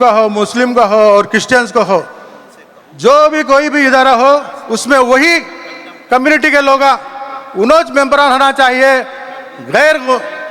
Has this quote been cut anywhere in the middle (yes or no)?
no